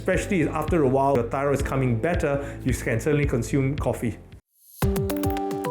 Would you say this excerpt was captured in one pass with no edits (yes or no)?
no